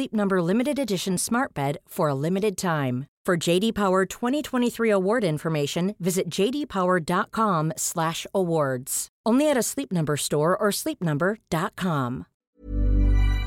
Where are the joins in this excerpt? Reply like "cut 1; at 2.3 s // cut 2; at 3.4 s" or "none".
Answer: cut 1; at 12.3 s

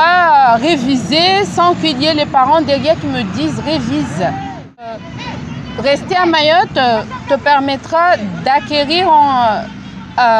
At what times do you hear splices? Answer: cut 1; at 4.9 s

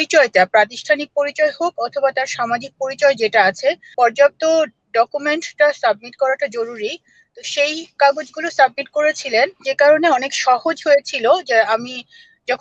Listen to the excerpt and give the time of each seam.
cut 1; at 3.9 s // cut 2; at 9.7 s

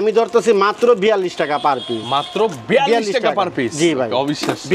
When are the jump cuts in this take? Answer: none

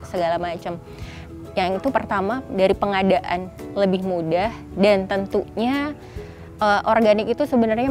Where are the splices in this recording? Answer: none

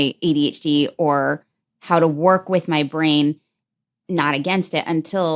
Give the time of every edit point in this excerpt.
none

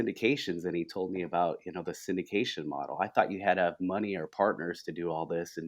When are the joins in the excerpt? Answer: none

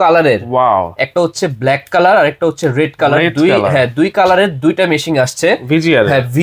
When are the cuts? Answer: none

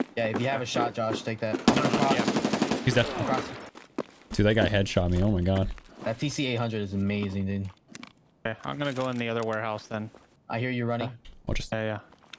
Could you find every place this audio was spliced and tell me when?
cut 1; at 3.6 s // cut 2; at 5.8 s // cut 3; at 10.3 s

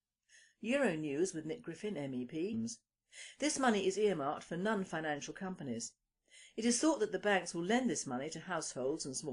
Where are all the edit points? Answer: none

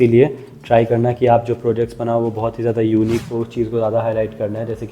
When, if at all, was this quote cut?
cut 1; at 3.2 s

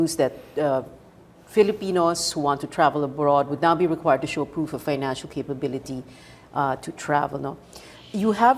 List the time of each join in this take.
cut 1; at 5.2 s

